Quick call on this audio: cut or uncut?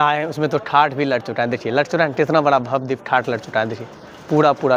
uncut